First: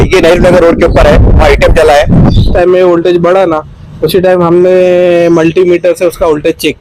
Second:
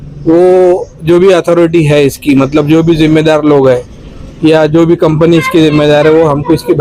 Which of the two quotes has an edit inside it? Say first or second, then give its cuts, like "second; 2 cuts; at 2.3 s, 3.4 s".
first; 1 cut; at 2.5 s